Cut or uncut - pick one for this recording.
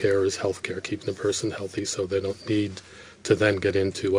uncut